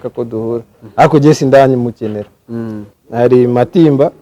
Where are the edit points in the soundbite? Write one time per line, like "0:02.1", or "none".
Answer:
0:02.9